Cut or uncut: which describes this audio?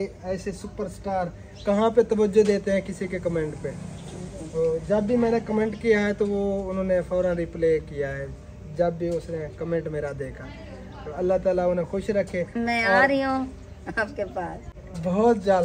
uncut